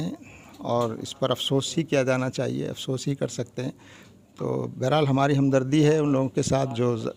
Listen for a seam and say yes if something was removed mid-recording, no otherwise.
no